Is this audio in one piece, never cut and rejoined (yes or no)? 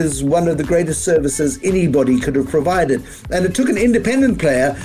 yes